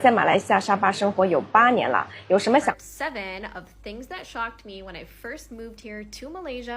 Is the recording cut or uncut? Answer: cut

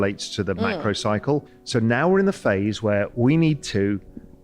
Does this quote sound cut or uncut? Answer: cut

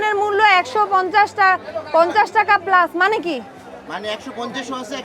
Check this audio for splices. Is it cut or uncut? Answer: uncut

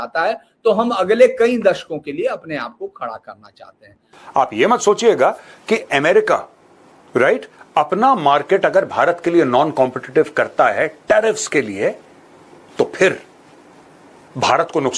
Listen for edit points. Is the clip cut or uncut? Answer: cut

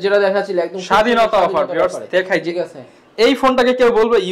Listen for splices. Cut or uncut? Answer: uncut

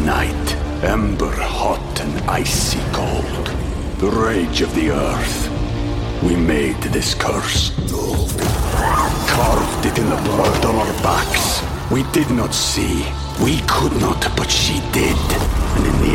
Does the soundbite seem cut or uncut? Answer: uncut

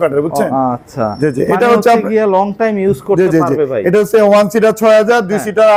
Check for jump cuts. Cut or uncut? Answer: uncut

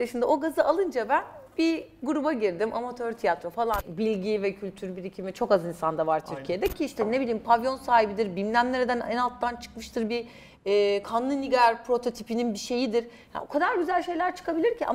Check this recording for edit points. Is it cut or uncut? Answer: cut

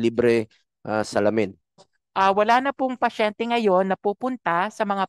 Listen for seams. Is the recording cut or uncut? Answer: cut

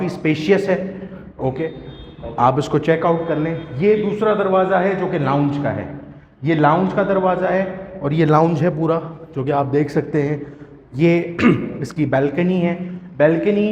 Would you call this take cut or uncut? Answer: uncut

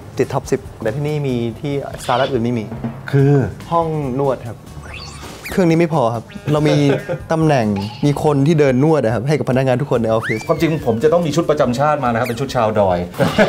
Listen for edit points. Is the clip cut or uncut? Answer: cut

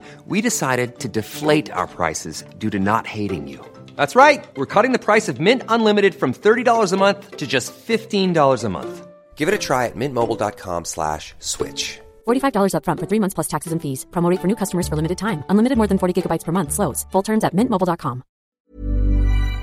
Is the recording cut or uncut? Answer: cut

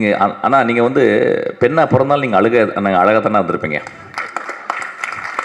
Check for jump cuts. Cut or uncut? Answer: uncut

